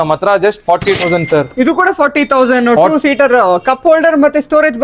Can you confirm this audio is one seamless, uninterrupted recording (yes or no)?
yes